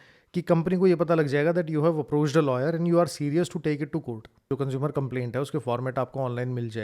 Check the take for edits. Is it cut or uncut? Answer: cut